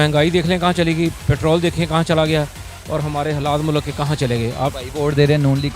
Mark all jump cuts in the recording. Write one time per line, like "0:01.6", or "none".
0:04.7